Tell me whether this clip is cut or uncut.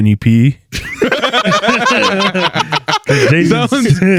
uncut